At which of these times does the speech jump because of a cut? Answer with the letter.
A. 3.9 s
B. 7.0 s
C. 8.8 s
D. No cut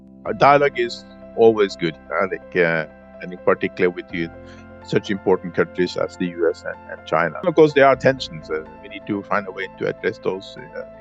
D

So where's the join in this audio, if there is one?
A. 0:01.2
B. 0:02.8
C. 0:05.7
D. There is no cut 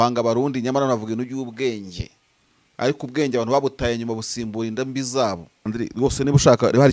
C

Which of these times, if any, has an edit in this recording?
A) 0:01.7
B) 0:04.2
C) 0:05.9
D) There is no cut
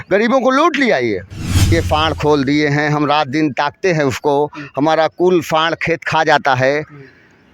A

